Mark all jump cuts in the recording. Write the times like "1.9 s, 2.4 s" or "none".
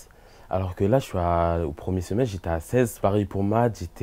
2.9 s